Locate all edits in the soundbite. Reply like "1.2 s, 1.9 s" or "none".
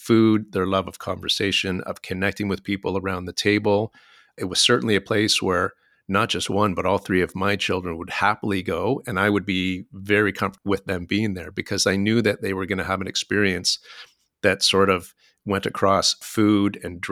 none